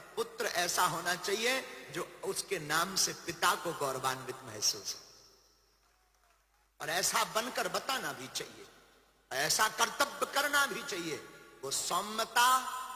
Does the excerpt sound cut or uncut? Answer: uncut